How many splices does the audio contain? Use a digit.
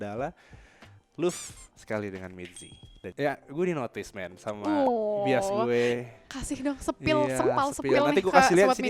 1